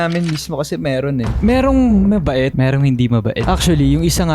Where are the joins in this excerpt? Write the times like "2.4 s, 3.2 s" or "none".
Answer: 1.4 s

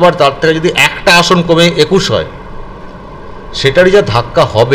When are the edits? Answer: none

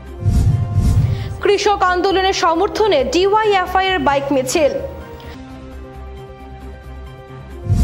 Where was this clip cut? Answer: 0.9 s

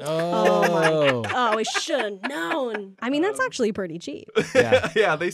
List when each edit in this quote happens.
2.9 s

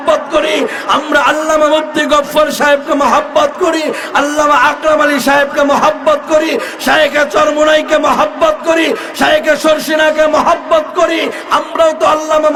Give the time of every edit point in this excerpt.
none

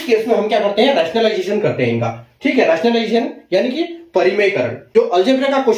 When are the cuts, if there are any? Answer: 4.8 s

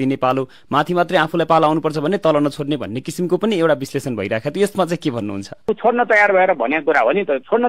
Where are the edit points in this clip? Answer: 5.7 s

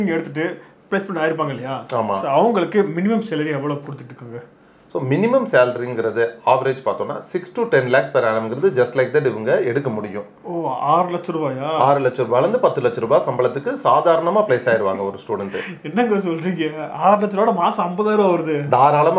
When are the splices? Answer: none

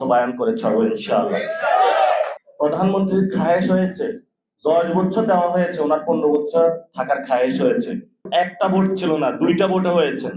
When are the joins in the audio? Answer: 2.4 s, 8.2 s

